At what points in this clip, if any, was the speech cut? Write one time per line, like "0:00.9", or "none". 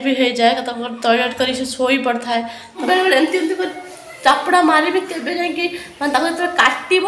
0:02.8